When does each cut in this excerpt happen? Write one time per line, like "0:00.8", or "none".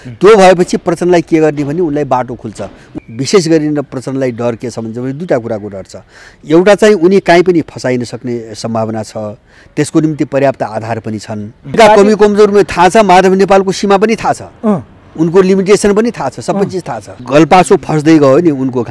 0:02.9
0:11.7
0:17.2